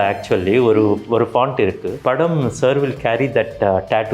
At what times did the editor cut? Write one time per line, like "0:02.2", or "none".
0:01.9